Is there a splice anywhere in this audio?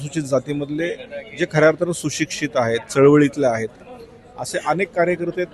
no; 0 cuts

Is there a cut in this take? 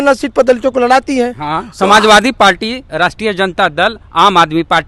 no; 0 cuts

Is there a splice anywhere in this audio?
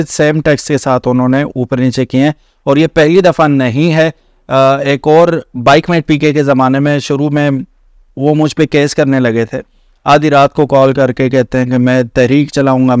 no; 0 cuts

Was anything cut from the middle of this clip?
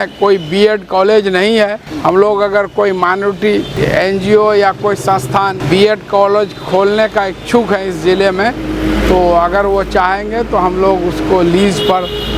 yes; 3 cuts; at 1.9 s, 3.7 s, 5.6 s

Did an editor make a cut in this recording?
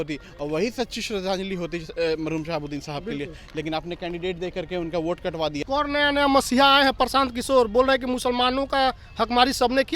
yes; 1 cut; at 5.6 s

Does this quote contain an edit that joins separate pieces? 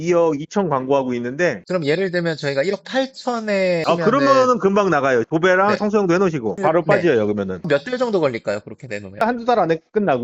yes; 3 cuts; at 1.6 s, 7.6 s, 9.2 s

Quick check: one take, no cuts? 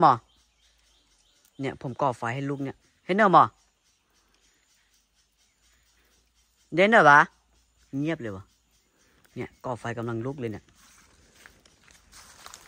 yes; 0 cuts

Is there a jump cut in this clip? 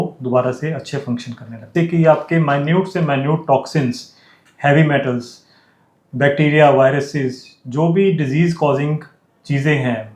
yes; 1 cut; at 1.6 s

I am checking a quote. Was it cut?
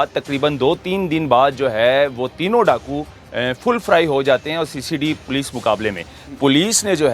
yes; 1 cut; at 6.2 s

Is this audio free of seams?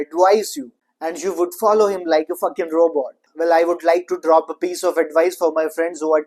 no; 1 cut; at 3.2 s

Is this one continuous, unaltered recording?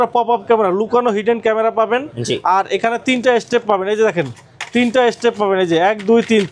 yes; 0 cuts

